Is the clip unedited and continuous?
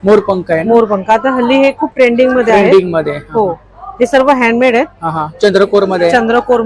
yes; 0 cuts

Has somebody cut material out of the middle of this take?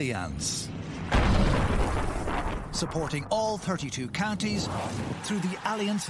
no; 0 cuts

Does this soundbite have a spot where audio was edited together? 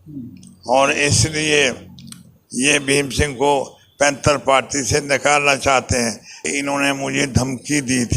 yes; 1 cut; at 6.4 s

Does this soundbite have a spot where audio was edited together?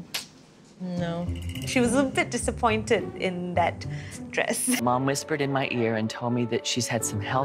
yes; 1 cut; at 4.8 s

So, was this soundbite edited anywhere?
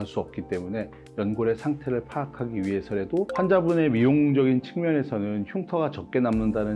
yes; 1 cut; at 3.3 s

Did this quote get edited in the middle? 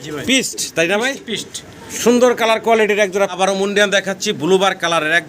yes; 1 cut; at 3.3 s

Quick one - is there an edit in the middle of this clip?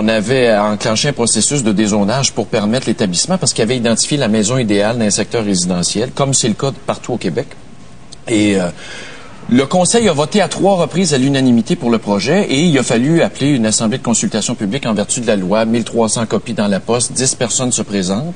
no; 0 cuts

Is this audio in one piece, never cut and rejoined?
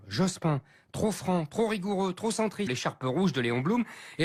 yes; 0 cuts

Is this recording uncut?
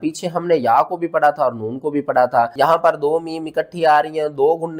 no; 1 cut; at 2.5 s

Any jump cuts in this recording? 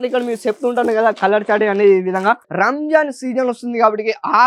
yes; 1 cut; at 2.5 s

